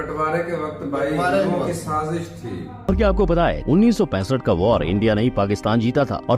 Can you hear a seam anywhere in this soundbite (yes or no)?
yes